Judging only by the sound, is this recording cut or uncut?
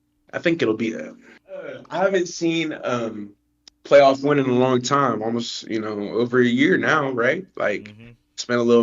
cut